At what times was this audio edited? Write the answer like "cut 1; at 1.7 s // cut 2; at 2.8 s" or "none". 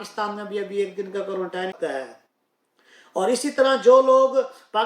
cut 1; at 1.8 s